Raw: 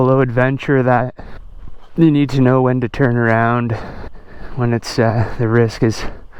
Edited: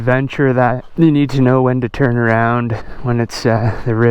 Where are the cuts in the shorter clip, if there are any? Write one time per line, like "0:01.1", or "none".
0:00.8
0:02.9